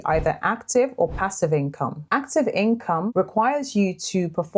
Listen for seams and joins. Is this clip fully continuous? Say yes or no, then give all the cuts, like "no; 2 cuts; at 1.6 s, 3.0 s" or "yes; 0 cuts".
no; 1 cut; at 3.1 s